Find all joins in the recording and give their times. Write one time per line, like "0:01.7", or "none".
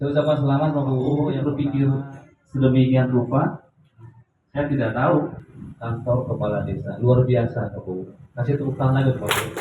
0:01.1